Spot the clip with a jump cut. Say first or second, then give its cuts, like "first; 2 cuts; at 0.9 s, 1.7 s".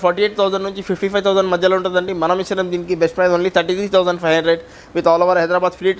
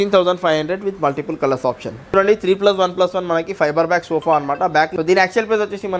second; 2 cuts; at 2.2 s, 4.9 s